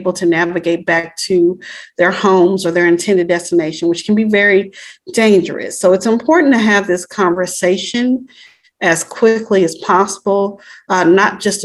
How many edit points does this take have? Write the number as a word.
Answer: zero